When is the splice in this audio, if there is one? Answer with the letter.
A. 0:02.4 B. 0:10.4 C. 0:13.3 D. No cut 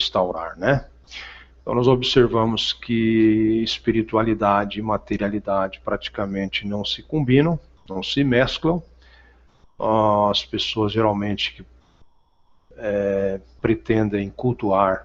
C